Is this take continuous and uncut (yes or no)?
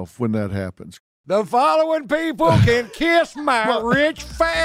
yes